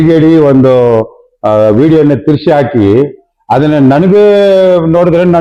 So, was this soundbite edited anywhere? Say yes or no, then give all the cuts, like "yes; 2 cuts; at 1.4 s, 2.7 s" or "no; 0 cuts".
no; 0 cuts